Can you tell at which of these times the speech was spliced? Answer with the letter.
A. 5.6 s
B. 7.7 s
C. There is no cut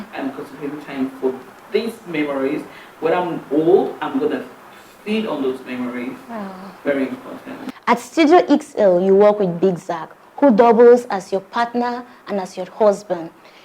B